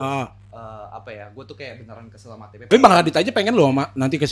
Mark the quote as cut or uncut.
cut